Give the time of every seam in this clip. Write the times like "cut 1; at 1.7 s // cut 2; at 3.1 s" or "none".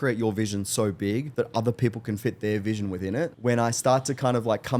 cut 1; at 1.3 s // cut 2; at 3.3 s